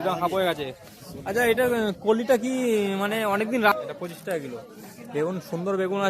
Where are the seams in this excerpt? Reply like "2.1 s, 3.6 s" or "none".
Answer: 3.7 s